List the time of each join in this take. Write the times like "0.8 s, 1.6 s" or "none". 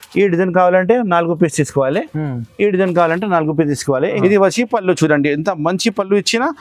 4.2 s

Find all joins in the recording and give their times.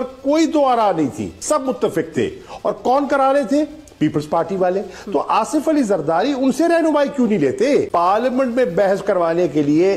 1.4 s, 7.9 s

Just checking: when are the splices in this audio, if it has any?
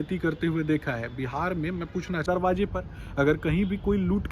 2.2 s

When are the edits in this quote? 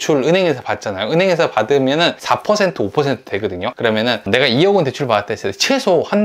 2.2 s, 3.7 s

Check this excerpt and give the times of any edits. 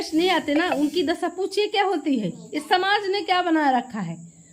none

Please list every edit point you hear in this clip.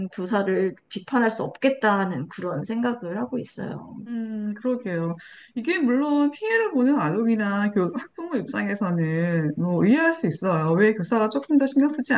none

